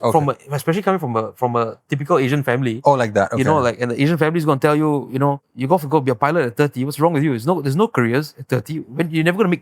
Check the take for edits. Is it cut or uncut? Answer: cut